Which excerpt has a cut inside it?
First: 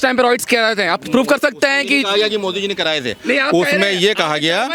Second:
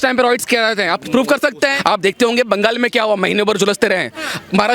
second; 1 cut; at 1.8 s

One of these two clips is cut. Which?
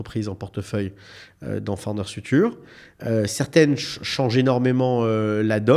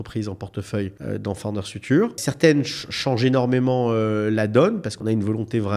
second; 3 cuts; at 1.0 s, 2.3 s, 4.9 s

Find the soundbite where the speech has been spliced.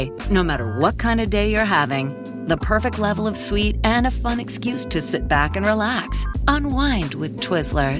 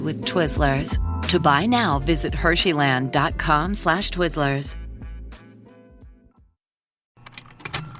second; 1 cut; at 7.1 s

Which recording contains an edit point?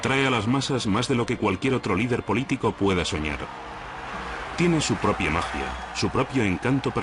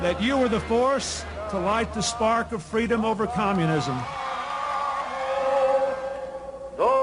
second; 1 cut; at 2.4 s

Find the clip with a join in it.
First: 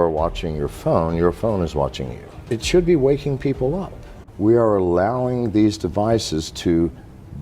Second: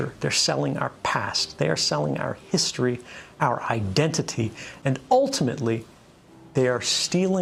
first; 2 cuts; at 2.3 s, 4.2 s

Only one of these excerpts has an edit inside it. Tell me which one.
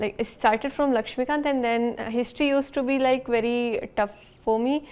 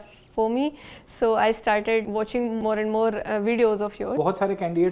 second; 2 cuts; at 2.2 s, 4.1 s

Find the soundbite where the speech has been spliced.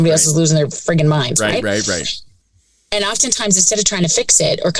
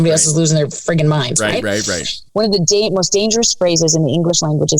second; 1 cut; at 2.2 s

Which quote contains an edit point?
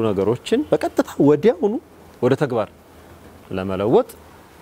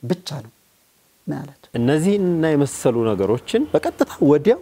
second; 1 cut; at 1.6 s

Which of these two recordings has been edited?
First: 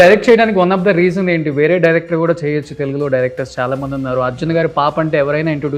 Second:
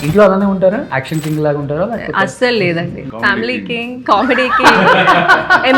second; 2 cuts; at 1.0 s, 3.1 s

